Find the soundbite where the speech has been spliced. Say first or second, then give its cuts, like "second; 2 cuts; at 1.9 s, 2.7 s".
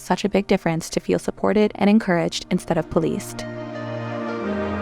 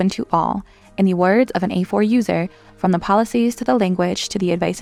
first; 1 cut; at 3.3 s